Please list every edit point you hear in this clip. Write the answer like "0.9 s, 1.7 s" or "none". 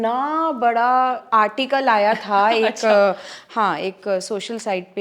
none